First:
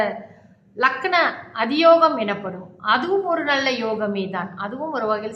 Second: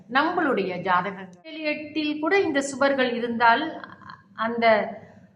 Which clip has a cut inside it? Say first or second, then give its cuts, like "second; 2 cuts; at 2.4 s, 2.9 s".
second; 1 cut; at 1.6 s